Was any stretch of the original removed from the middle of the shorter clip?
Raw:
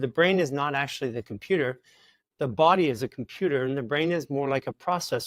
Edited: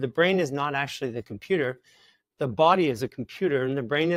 no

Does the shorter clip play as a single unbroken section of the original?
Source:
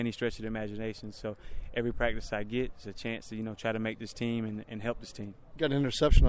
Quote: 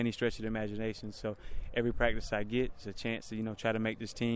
yes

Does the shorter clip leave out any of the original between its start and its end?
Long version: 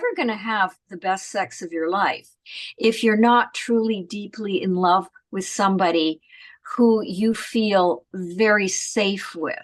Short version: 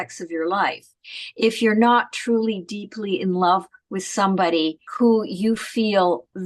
yes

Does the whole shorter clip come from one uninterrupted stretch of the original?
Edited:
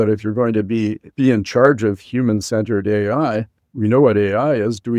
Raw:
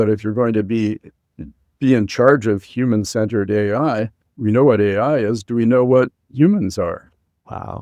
no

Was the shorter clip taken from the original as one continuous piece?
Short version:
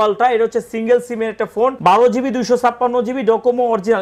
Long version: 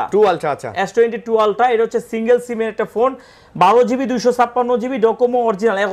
no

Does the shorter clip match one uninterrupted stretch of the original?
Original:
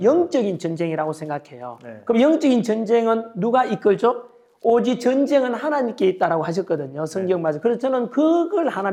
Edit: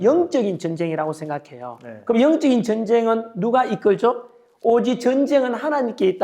yes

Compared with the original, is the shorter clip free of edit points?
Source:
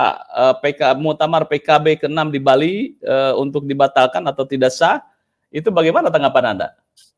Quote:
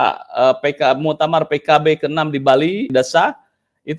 no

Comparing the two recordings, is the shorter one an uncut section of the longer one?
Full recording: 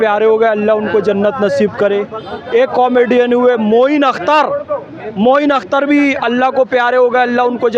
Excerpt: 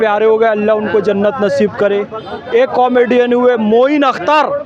yes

